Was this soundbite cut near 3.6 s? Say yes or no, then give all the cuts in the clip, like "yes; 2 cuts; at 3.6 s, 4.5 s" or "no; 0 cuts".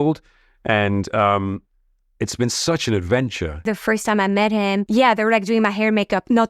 yes; 2 cuts; at 3.6 s, 4.9 s